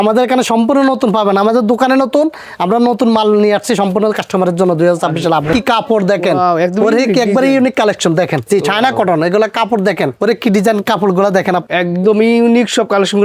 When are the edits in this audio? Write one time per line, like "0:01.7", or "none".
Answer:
0:05.5
0:08.4
0:10.1
0:11.6